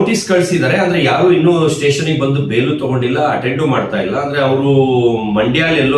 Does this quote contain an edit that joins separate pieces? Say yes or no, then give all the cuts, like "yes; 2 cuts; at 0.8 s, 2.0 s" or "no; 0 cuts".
no; 0 cuts